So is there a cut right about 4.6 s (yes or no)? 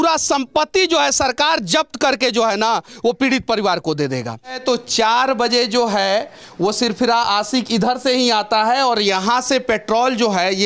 yes